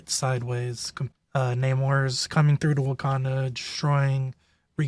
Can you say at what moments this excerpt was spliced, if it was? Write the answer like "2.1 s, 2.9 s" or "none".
1.1 s